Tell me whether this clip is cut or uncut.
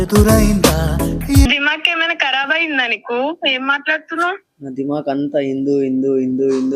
cut